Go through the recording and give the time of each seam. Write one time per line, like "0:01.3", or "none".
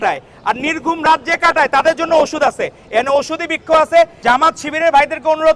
0:04.2